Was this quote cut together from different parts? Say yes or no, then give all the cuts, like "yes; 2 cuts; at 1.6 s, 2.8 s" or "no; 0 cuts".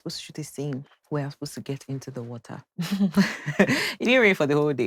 no; 0 cuts